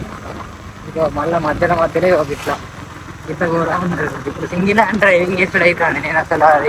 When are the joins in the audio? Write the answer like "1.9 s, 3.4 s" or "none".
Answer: none